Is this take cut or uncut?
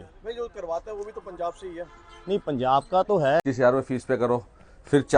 cut